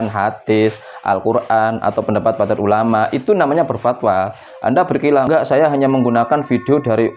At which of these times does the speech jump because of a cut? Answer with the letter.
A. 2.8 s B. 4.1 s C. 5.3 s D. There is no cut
C